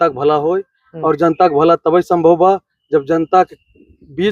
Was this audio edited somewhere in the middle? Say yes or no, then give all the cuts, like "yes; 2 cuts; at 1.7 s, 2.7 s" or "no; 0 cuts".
no; 0 cuts